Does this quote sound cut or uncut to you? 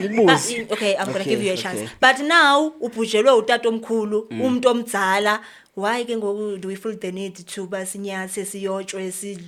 uncut